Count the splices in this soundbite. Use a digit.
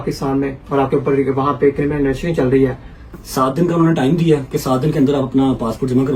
1